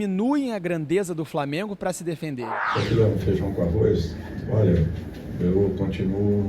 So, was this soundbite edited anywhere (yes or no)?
yes